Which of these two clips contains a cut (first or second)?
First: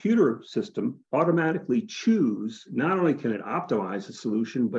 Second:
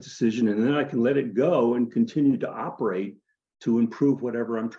first